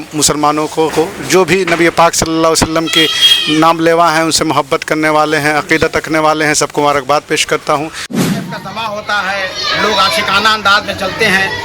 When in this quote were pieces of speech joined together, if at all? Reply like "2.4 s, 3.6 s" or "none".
0.9 s, 8.1 s

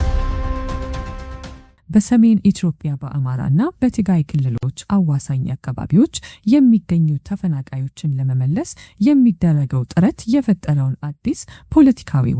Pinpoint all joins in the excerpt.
none

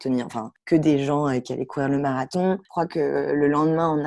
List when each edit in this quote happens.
2.7 s

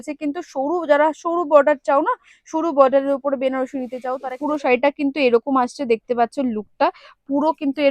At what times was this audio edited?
4.3 s

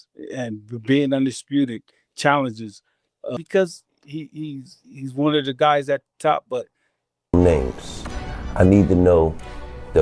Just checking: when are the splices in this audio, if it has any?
3.4 s, 7.3 s

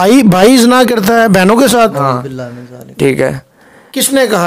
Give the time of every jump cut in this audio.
none

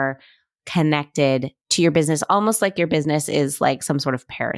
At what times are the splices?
1.7 s

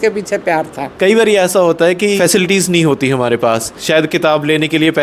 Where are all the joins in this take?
0.9 s, 2.2 s, 3.7 s

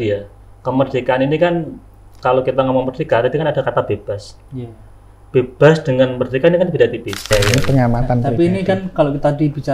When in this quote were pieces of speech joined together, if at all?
7.3 s

